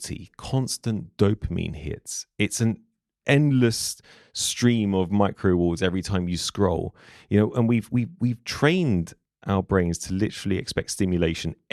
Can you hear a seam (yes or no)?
no